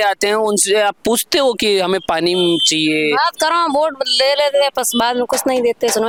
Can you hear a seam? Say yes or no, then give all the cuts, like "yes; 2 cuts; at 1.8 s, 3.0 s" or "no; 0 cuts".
no; 0 cuts